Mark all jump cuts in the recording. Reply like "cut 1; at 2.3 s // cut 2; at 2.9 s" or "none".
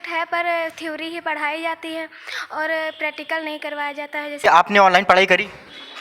cut 1; at 4.4 s

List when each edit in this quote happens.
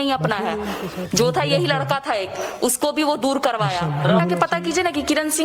cut 1; at 4.2 s

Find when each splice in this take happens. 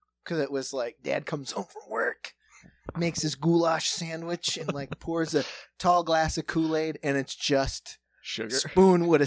none

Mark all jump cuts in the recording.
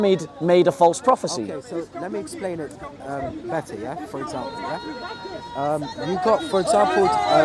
none

